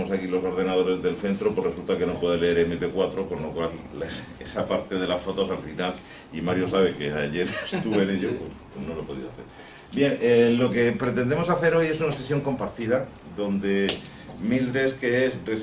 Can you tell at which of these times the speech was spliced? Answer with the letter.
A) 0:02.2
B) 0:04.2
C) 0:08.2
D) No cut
A